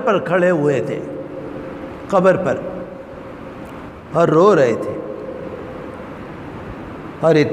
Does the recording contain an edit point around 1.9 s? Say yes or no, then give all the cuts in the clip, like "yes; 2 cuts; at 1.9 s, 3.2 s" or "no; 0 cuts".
no; 1 cut; at 4.0 s